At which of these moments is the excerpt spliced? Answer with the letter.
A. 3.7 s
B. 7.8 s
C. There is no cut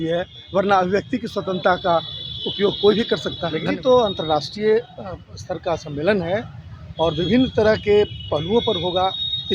A